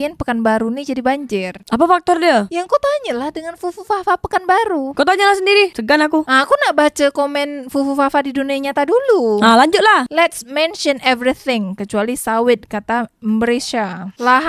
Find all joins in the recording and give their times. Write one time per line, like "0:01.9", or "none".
none